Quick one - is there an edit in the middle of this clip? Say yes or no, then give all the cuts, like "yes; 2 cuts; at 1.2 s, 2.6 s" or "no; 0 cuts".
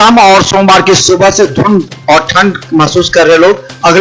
no; 0 cuts